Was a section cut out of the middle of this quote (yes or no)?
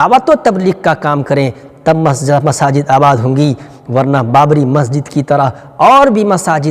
no